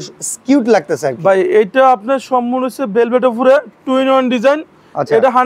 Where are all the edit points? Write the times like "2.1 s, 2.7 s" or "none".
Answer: none